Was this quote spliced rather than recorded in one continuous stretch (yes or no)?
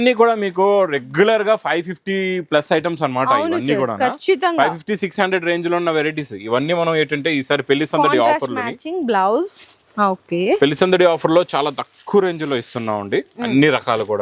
no